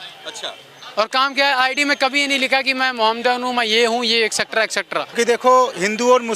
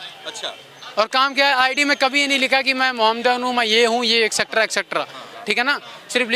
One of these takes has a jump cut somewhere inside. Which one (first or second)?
first